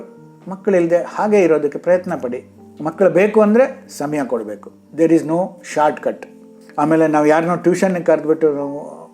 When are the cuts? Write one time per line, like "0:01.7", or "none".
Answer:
none